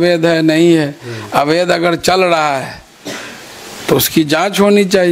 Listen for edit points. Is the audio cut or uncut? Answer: uncut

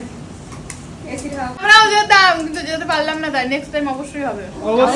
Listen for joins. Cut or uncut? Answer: cut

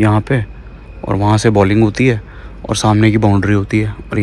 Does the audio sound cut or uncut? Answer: uncut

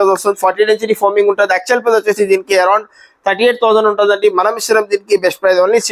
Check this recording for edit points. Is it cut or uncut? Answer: uncut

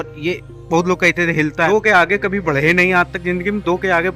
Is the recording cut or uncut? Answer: cut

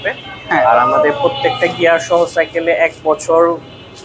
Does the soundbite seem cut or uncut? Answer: uncut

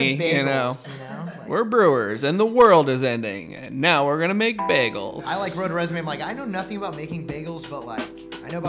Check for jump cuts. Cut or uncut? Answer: uncut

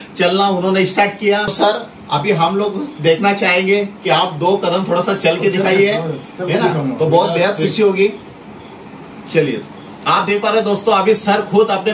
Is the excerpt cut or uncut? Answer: cut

